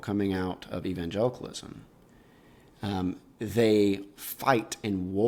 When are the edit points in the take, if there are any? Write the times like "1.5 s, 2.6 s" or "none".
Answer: none